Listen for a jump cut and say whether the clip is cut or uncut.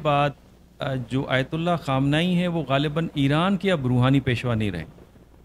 uncut